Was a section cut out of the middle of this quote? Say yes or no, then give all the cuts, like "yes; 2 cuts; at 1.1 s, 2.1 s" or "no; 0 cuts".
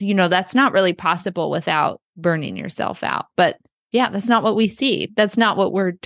yes; 1 cut; at 2.1 s